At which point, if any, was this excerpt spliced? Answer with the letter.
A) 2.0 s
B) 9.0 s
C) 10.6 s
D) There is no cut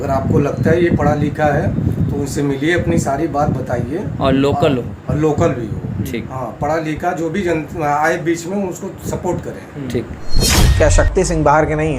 C